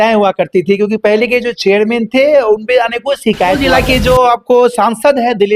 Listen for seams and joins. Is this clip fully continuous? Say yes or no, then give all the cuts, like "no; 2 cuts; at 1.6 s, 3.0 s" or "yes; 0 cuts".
no; 1 cut; at 3.6 s